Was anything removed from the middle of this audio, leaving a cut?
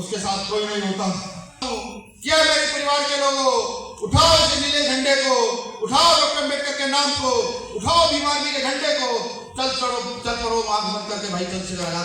yes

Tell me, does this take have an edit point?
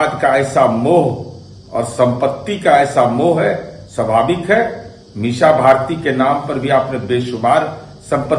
no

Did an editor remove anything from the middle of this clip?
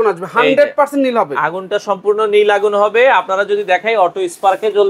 no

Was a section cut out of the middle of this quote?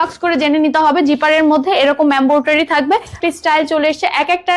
yes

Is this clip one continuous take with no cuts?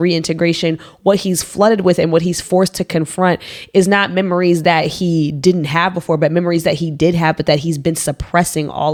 yes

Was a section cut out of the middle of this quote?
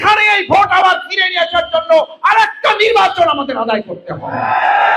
no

